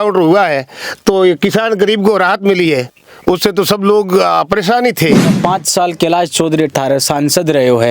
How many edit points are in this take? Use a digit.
1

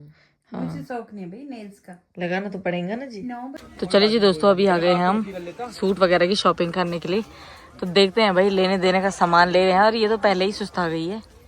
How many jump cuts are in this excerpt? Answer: 1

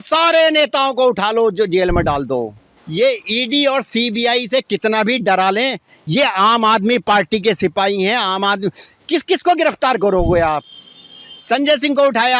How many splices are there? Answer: 1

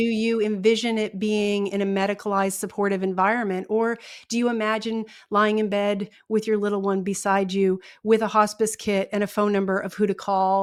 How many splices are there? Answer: 0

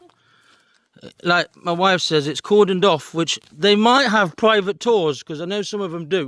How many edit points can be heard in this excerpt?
0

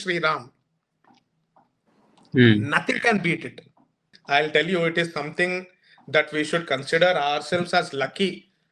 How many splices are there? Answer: 1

